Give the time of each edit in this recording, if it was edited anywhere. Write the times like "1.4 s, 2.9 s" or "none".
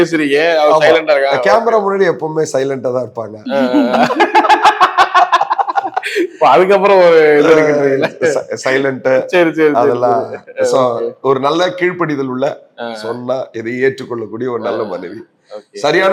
none